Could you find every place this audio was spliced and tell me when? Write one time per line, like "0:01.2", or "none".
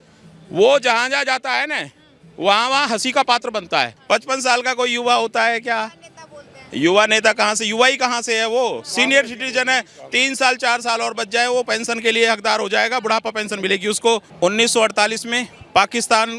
0:04.0
0:14.3